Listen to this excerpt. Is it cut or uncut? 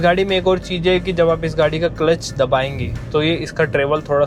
uncut